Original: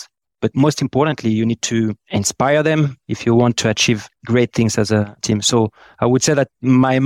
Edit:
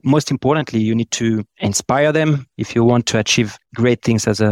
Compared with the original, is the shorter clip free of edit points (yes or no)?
yes